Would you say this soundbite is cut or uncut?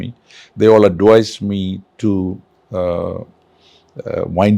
cut